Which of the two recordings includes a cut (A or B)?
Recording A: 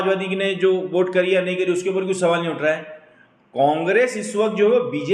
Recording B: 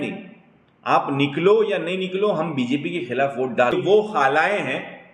B